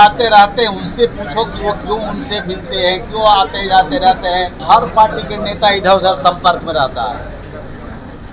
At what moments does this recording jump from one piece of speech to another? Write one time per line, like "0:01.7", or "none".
0:04.6